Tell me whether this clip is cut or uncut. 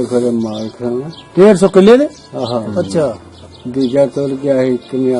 cut